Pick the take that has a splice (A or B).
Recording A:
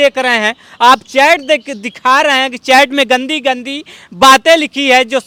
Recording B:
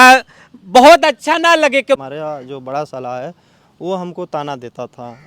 B